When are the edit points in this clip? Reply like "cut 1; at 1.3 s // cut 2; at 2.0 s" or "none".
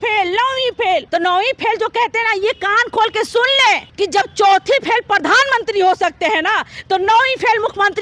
cut 1; at 1.1 s // cut 2; at 3.9 s